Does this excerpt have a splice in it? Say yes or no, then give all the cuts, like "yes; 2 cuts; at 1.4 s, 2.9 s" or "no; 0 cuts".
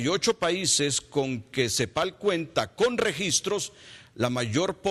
no; 0 cuts